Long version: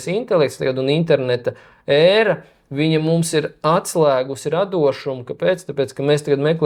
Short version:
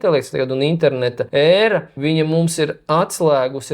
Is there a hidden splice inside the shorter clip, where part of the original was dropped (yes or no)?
yes